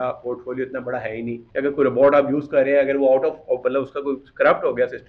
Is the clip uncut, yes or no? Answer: no